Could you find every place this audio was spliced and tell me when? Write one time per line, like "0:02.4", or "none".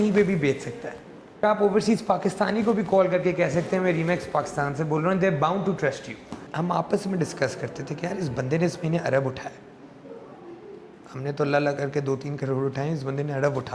0:01.4
0:06.4